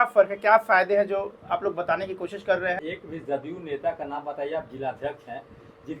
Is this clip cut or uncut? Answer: cut